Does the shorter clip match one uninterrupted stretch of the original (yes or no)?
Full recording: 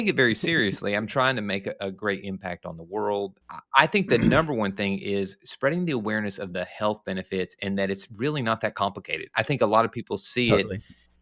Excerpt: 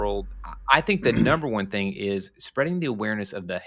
yes